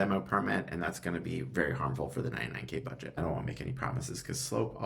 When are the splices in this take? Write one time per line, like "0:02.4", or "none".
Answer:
0:03.2

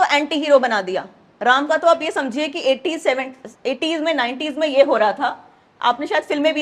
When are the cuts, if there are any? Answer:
none

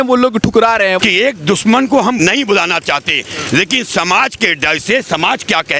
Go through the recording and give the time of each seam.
0:01.0
0:02.2

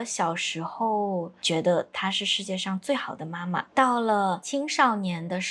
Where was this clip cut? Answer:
0:01.4
0:03.6
0:04.4

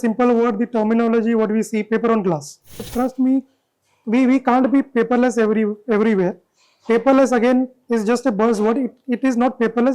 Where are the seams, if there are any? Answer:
0:02.9

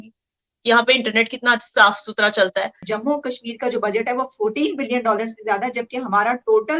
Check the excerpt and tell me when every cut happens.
0:02.8

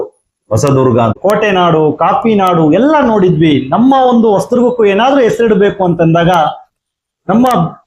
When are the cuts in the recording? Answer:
0:01.2

